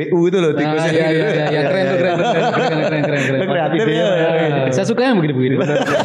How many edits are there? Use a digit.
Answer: 0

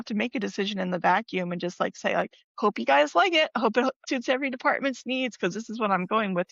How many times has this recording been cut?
2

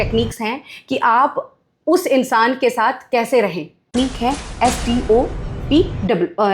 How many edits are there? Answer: 1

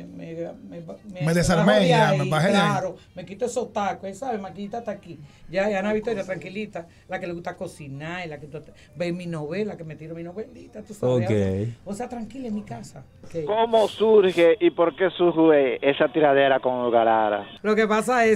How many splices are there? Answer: 2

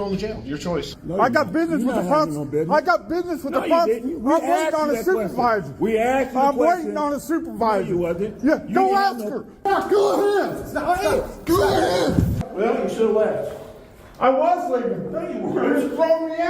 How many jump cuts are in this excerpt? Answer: 3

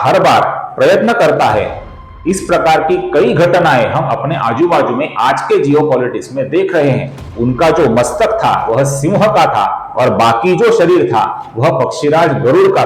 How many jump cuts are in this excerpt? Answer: 1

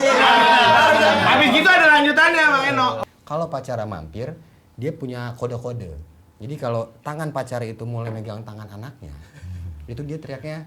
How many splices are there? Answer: 1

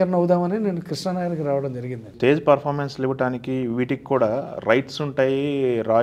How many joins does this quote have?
1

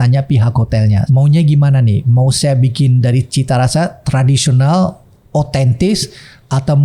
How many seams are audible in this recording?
1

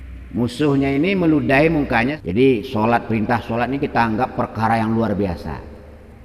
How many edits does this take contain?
1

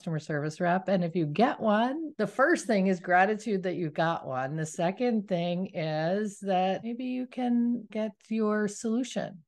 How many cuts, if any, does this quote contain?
3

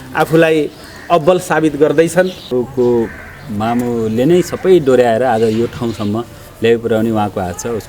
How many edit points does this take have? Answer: 1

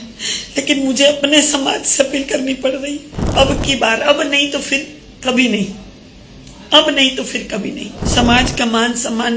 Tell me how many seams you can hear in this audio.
2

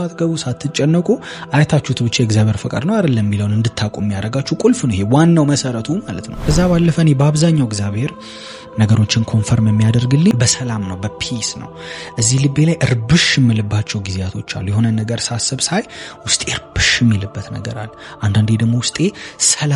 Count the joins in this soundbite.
2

